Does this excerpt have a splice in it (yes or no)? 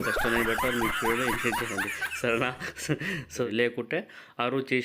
yes